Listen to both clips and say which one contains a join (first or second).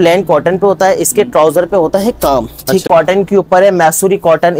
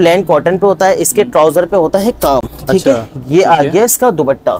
first